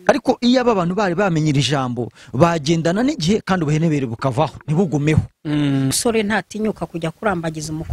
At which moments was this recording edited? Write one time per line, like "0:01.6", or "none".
0:05.9